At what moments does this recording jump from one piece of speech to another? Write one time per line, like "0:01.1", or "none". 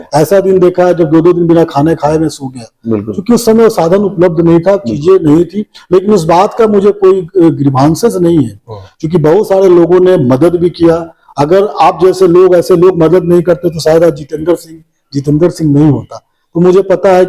none